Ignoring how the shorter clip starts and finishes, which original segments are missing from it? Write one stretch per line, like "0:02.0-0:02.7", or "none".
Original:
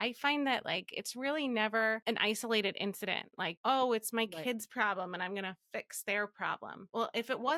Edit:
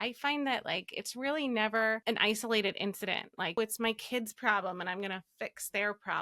0:03.6-0:03.9